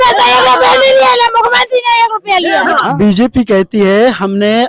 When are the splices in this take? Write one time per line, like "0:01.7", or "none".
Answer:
0:02.8